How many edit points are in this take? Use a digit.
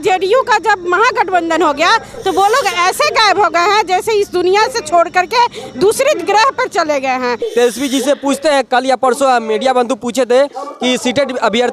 1